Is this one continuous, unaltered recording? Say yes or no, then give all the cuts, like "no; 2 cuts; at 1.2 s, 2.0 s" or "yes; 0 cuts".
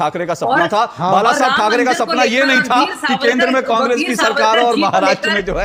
yes; 0 cuts